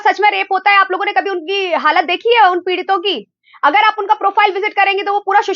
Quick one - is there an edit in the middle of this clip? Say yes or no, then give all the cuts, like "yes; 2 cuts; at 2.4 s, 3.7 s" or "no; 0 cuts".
no; 0 cuts